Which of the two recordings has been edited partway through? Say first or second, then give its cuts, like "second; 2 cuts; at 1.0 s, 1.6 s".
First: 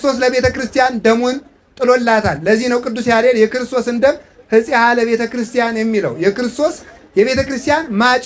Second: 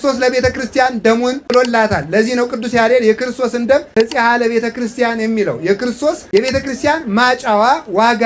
second; 3 cuts; at 1.4 s, 3.9 s, 6.2 s